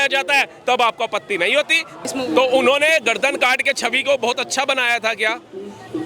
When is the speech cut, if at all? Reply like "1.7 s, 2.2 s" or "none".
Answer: 2.0 s